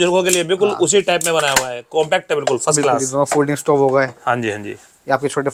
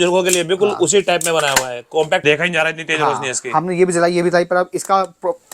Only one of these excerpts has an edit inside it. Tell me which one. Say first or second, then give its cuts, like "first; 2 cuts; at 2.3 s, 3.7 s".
second; 1 cut; at 2.2 s